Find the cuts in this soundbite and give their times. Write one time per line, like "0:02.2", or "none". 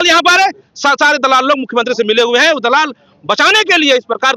none